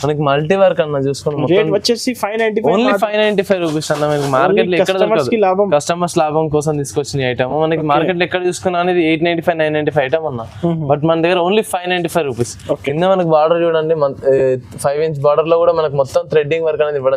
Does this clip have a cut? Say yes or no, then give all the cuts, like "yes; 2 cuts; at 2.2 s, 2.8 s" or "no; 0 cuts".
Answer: no; 0 cuts